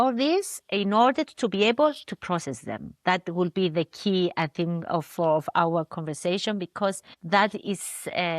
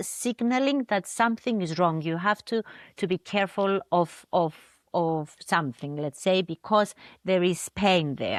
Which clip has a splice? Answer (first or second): first